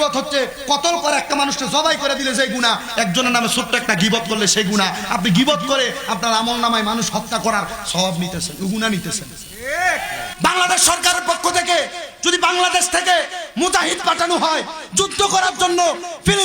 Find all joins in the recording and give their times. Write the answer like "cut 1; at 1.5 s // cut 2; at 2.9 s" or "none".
cut 1; at 10.3 s